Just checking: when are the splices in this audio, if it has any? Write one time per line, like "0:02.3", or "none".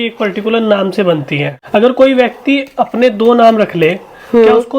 0:01.5